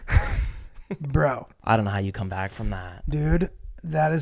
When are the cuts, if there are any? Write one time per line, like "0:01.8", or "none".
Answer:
0:01.5